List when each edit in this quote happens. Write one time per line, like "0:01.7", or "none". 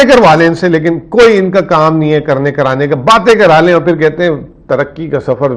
none